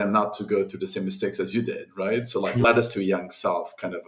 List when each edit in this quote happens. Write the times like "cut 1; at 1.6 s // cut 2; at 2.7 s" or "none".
cut 1; at 2.6 s